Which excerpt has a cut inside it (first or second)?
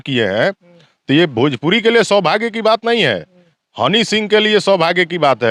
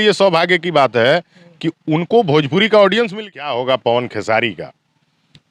second